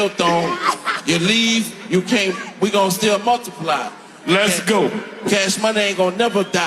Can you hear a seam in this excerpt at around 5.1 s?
yes; 1 cut; at 5.1 s

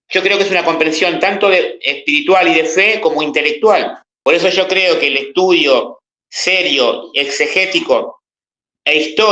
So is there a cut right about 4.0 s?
yes; 1 cut; at 4.0 s

